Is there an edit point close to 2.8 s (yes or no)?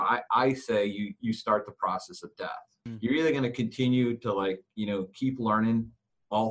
yes